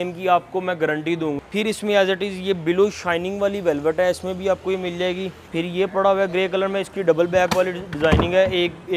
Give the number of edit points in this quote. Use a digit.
2